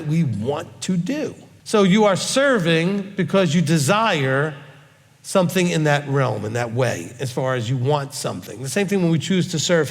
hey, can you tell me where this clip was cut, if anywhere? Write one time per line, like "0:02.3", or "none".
0:01.5